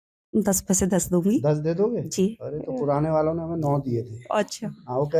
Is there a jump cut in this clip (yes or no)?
no